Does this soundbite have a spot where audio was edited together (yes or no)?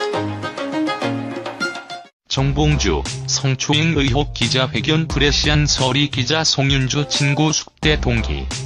no